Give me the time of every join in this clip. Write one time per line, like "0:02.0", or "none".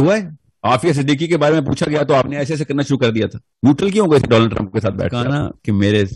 0:05.2